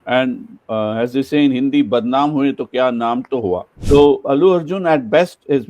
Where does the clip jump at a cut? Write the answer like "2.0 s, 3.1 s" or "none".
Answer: 3.7 s